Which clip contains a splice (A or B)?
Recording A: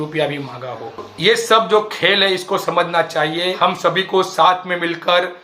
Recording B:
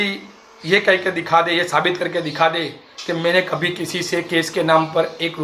A